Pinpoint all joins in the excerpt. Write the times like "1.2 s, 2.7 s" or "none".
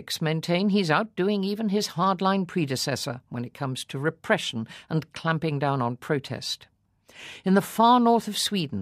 none